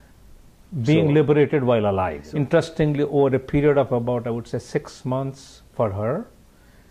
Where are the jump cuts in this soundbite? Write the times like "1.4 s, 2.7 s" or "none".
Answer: 2.2 s